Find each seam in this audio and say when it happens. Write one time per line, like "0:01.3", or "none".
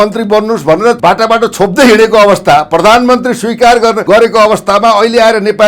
0:01.0
0:04.0

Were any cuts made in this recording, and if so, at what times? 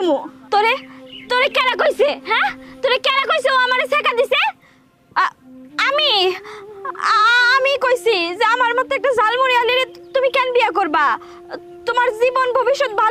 none

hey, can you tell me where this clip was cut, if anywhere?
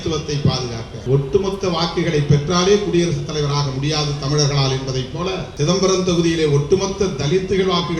0:00.9
0:05.5

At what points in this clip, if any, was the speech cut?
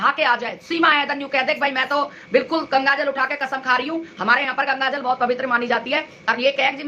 none

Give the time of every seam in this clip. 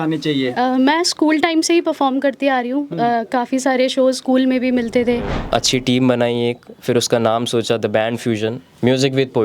0:05.4

